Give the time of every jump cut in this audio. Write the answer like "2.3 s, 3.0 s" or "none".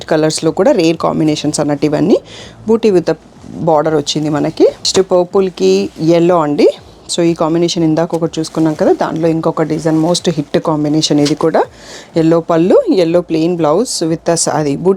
4.9 s

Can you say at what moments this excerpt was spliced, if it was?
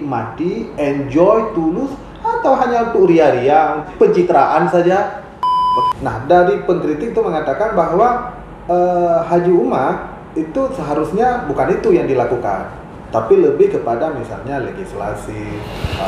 3.9 s, 5.6 s

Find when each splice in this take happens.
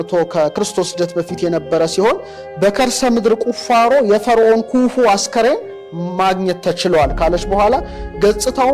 none

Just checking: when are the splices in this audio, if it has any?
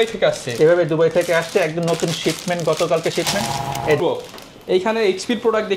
4.0 s

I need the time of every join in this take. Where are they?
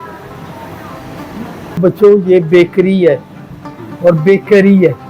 1.8 s

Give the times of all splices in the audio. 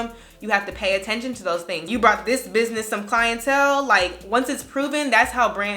1.8 s

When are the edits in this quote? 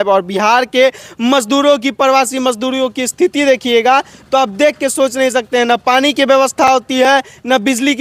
none

